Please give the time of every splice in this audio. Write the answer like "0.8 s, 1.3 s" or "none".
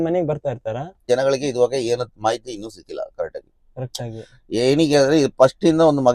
1.0 s